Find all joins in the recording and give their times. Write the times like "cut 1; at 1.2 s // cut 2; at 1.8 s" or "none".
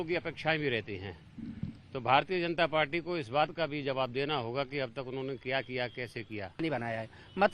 cut 1; at 6.6 s